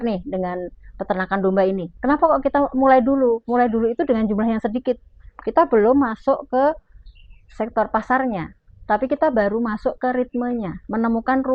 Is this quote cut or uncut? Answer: uncut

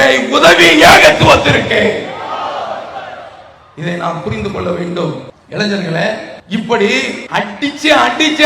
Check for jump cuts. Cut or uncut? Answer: cut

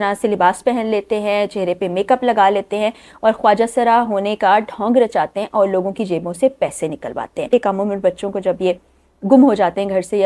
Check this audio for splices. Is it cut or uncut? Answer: cut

